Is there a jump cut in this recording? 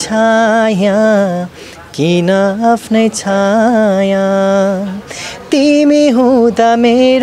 no; 0 cuts

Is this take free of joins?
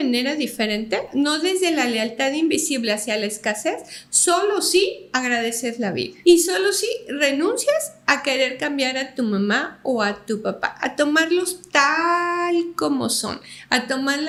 yes; 0 cuts

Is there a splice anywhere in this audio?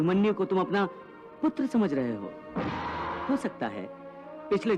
yes; 1 cut; at 3.2 s

